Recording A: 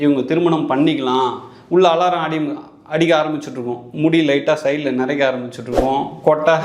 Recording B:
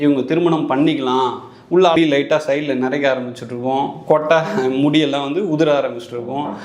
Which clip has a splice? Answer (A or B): B